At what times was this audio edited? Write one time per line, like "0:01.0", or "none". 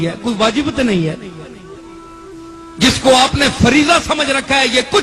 none